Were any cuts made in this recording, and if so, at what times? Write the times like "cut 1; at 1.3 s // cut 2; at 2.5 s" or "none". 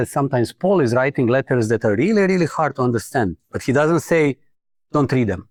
none